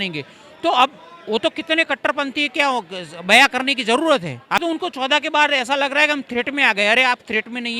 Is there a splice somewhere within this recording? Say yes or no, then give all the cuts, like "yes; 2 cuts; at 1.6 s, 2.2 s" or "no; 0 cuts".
yes; 1 cut; at 4.6 s